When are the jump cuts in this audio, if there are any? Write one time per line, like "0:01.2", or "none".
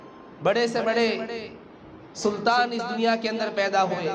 none